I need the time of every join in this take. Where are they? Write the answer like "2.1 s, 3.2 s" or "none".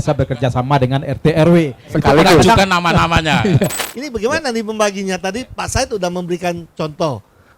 3.8 s